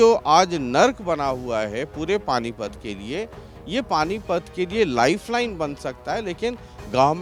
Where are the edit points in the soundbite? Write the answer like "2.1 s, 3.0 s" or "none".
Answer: none